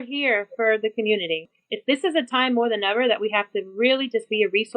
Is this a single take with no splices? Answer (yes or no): no